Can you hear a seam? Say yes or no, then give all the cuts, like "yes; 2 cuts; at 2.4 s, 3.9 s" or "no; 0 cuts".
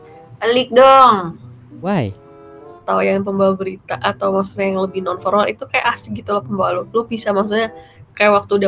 yes; 1 cut; at 2.8 s